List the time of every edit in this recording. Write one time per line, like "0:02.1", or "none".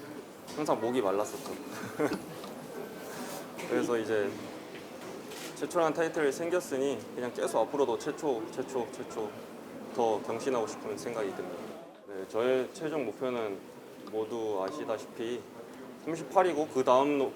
0:11.8